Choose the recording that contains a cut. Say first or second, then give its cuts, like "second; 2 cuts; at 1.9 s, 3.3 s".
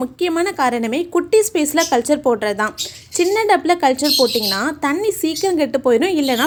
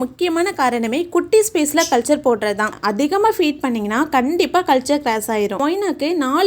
second; 2 cuts; at 2.8 s, 5.5 s